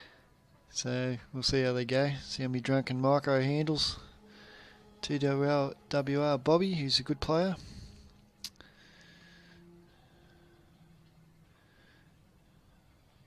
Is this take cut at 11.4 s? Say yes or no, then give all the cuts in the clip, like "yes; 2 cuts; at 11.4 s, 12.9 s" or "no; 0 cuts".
yes; 1 cut; at 11.4 s